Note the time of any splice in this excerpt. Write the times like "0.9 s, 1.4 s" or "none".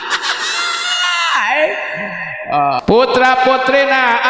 2.8 s